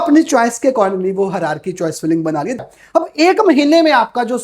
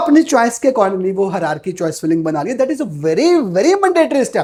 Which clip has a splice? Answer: first; 1 cut; at 2.6 s

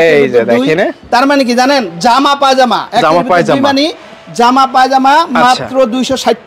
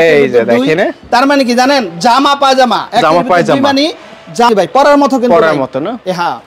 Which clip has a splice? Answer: second; 1 cut; at 4.5 s

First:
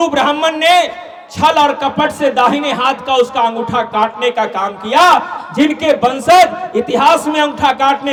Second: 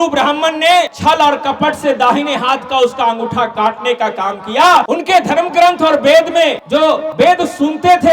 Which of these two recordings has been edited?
second; 3 cuts; at 0.9 s, 4.9 s, 7.0 s

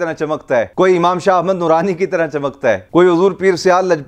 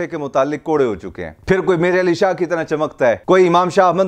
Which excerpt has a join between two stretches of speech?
second; 1 cut; at 1.3 s

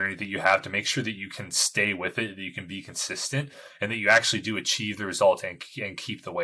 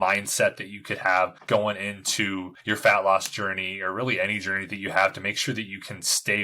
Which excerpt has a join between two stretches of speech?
second; 2 cuts; at 1.4 s, 2.5 s

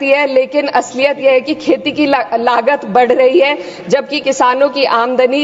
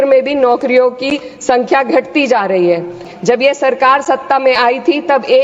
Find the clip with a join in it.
second; 1 cut; at 3.0 s

